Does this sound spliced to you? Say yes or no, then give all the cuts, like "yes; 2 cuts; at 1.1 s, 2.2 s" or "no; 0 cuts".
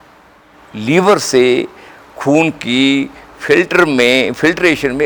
no; 0 cuts